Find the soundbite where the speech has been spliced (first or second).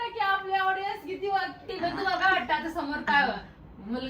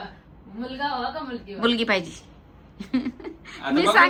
first